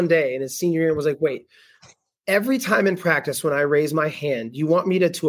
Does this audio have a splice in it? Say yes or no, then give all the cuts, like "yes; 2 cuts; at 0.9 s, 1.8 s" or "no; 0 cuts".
no; 0 cuts